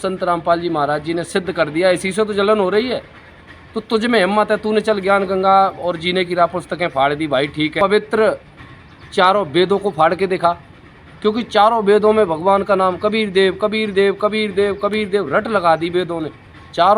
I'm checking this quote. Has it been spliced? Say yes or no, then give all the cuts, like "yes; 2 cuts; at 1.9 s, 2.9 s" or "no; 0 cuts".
yes; 1 cut; at 7.7 s